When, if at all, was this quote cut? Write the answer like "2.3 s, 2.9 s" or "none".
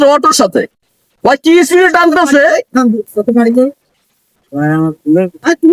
none